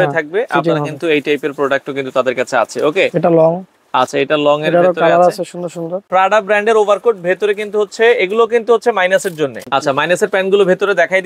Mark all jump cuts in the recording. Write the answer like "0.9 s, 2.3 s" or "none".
6.0 s, 9.6 s

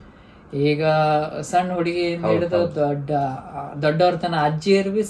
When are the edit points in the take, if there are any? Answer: none

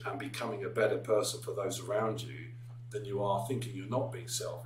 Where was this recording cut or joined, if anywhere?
none

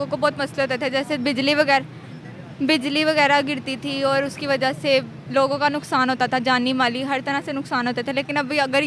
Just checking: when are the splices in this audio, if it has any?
none

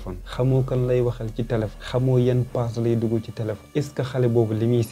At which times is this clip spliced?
1.8 s, 3.6 s

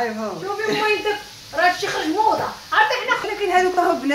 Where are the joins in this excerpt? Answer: 3.2 s

